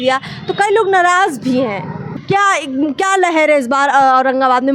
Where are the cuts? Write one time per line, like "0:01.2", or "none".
0:02.0